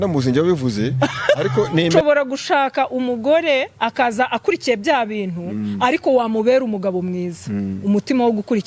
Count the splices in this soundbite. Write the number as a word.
one